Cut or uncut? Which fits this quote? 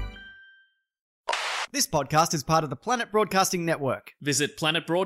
cut